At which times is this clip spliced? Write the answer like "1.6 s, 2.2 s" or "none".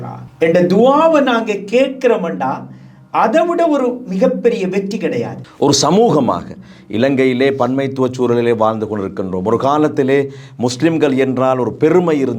5.5 s